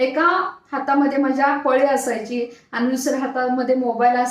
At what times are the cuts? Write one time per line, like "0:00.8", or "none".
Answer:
none